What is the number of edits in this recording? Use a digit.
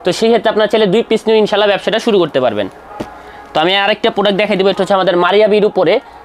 0